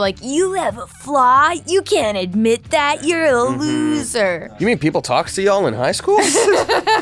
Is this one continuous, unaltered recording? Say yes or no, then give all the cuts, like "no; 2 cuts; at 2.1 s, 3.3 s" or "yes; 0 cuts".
no; 1 cut; at 4.5 s